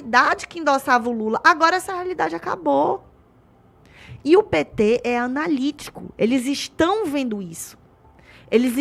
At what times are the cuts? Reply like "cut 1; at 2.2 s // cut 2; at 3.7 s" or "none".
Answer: none